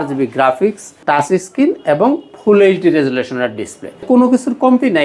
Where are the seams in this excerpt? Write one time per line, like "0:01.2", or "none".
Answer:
0:00.9
0:04.0